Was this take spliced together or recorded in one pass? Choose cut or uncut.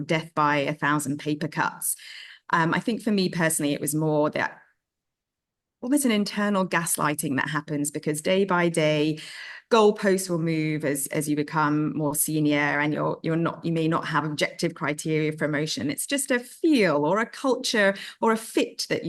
uncut